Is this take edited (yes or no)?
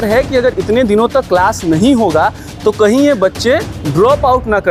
no